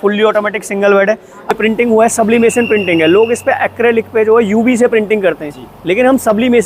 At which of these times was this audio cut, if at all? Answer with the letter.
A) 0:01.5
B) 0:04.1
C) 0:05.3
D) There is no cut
A